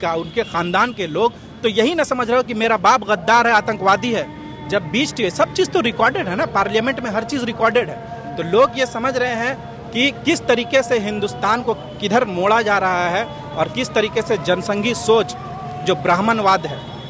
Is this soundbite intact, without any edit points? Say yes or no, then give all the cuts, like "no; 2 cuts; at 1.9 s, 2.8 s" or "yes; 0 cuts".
yes; 0 cuts